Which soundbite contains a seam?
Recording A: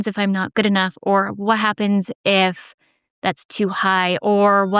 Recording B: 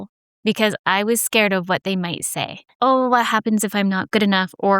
B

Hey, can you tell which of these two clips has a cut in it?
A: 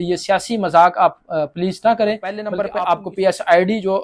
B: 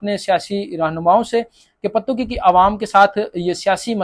A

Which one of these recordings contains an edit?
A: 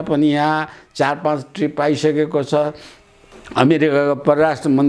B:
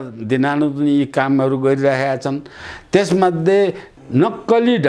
B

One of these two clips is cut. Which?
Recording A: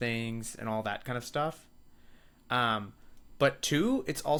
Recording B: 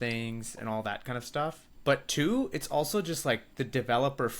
B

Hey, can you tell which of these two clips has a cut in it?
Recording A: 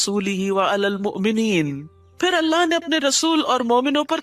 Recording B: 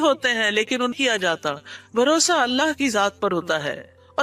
B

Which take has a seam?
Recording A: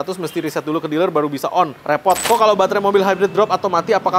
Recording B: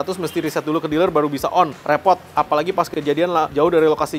A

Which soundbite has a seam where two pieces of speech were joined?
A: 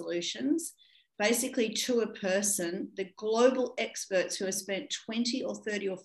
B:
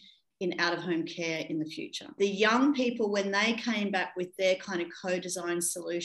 B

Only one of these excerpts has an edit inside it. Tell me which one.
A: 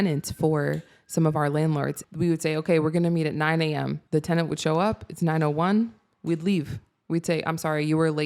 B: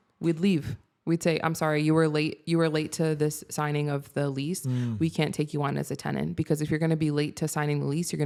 A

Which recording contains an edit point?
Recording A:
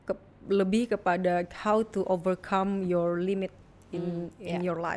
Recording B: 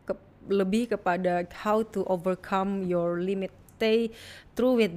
B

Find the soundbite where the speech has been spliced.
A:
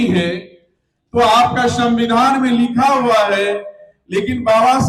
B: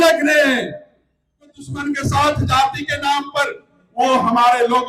B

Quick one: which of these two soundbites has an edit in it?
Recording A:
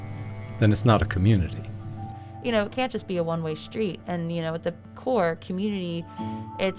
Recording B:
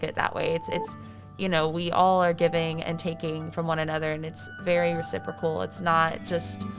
A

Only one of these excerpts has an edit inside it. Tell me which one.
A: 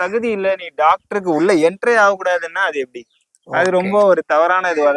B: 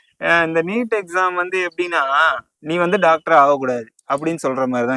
B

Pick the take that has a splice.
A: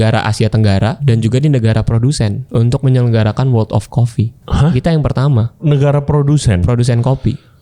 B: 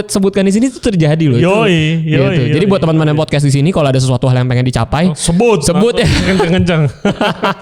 A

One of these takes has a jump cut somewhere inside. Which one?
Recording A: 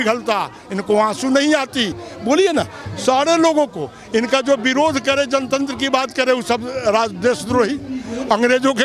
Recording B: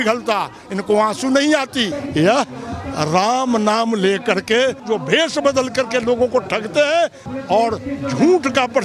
B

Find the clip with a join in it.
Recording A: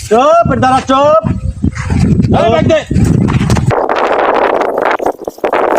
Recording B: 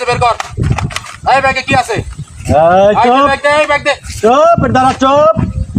A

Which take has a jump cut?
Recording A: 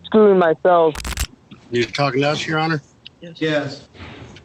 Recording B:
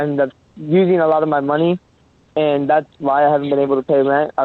A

